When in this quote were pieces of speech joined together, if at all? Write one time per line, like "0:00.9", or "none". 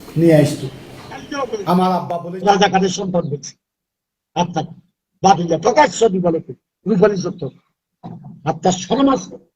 0:02.2